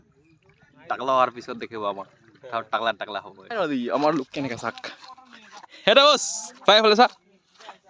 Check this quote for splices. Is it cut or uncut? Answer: cut